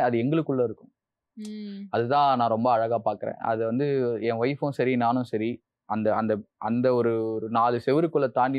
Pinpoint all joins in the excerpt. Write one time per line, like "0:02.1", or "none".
none